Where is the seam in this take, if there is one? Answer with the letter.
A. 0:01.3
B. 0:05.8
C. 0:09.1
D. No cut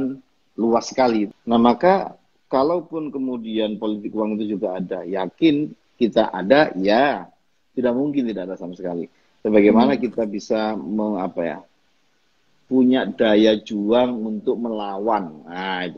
A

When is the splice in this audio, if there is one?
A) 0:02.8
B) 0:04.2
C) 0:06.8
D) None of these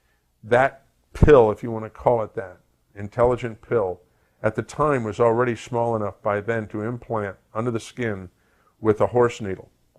B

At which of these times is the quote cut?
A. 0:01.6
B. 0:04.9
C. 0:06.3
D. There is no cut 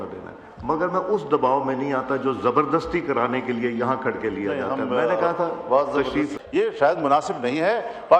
C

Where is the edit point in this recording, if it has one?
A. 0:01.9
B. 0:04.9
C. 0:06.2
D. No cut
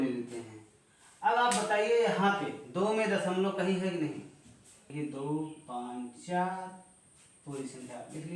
B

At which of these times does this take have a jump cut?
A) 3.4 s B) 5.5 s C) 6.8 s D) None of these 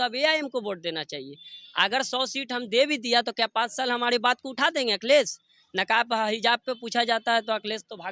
D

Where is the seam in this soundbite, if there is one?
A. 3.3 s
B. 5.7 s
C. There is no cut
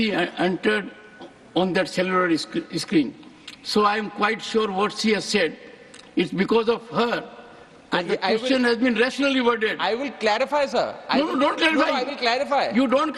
C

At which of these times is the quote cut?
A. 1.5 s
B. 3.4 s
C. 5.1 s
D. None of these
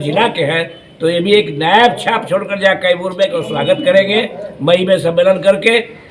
B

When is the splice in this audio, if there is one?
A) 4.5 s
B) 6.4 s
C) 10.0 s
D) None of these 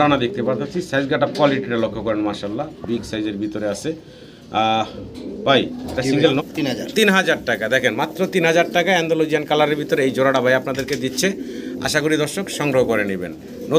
B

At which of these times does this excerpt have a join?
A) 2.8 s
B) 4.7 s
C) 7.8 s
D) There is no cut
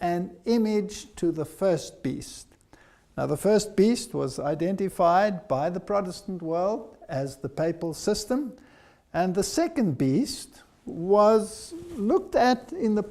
C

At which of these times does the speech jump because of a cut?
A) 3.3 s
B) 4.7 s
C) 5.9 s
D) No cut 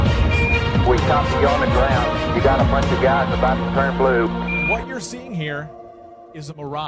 A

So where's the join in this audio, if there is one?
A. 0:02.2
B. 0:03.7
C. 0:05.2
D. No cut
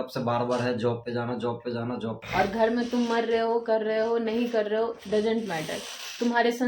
A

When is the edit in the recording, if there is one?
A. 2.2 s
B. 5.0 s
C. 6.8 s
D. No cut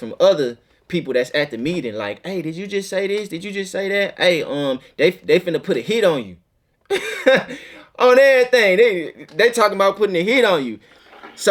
D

